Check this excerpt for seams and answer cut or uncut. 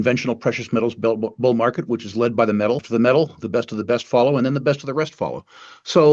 cut